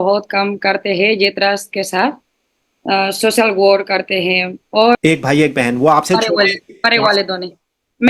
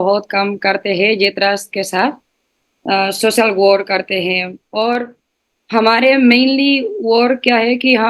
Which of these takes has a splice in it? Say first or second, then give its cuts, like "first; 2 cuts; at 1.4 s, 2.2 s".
first; 1 cut; at 5.0 s